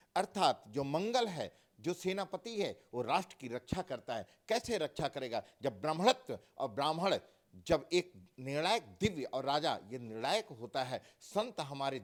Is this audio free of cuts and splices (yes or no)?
yes